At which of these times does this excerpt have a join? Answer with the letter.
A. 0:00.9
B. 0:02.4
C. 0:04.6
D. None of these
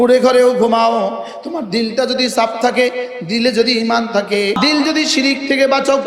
C